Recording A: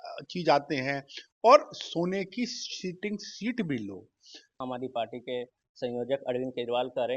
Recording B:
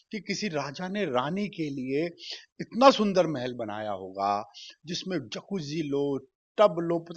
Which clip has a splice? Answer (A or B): A